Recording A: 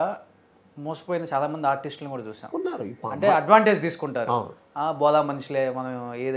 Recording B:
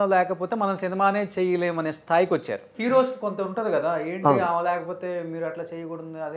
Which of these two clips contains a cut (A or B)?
B